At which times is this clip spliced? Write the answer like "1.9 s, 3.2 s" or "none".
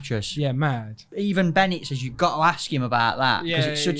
1.0 s

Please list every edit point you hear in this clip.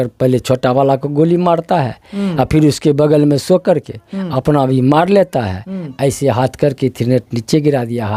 none

